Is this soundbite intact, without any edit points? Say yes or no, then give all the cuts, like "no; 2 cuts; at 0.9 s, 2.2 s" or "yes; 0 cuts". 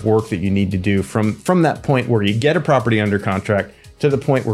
yes; 0 cuts